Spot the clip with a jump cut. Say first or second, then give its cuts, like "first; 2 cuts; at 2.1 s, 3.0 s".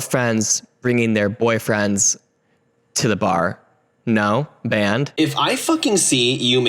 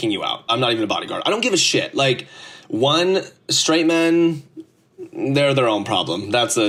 first; 1 cut; at 5.1 s